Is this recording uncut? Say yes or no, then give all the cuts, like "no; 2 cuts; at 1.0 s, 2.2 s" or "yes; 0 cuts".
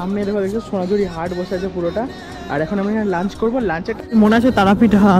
no; 1 cut; at 4.0 s